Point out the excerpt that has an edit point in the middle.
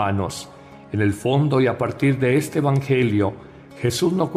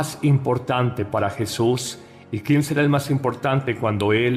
second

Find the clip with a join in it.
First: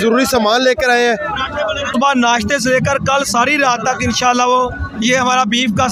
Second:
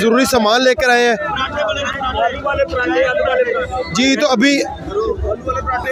first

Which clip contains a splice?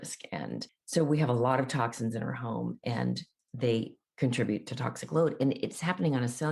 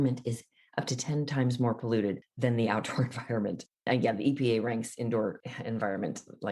second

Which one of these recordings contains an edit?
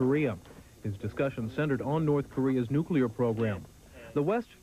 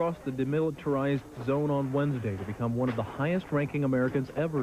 second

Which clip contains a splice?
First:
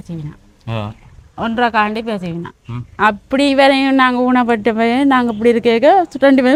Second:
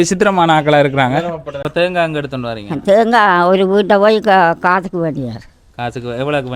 second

